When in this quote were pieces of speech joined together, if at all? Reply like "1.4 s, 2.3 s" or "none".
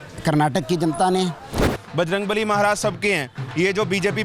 1.7 s